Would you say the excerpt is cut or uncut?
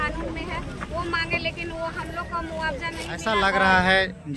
cut